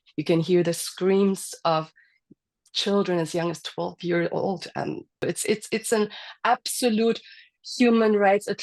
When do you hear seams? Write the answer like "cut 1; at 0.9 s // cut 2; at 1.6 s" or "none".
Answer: cut 1; at 5.2 s